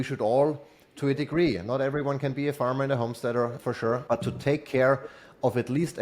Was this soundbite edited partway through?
yes; 1 cut; at 3.6 s

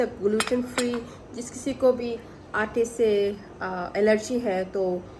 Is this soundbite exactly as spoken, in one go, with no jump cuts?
yes; 0 cuts

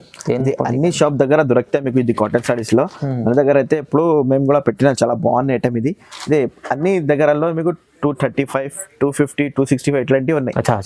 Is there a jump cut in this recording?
no; 0 cuts

